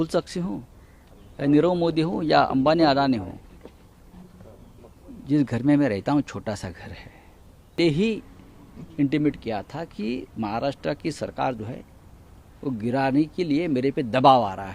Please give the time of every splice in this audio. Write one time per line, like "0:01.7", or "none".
0:07.8